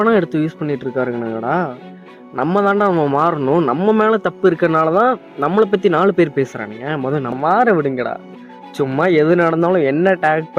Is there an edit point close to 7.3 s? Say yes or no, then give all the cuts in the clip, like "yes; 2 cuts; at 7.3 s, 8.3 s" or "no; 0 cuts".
yes; 1 cut; at 7.3 s